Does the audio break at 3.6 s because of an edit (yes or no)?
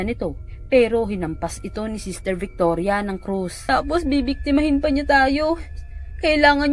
yes